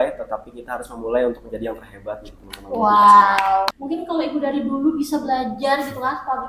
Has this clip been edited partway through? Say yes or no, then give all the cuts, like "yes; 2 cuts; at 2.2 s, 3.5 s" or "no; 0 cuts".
yes; 1 cut; at 3.7 s